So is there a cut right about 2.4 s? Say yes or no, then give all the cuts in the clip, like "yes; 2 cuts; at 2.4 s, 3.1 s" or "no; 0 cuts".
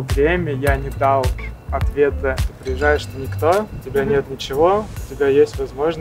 yes; 1 cut; at 2.4 s